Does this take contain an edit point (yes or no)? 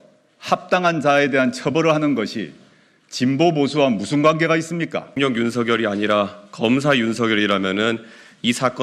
yes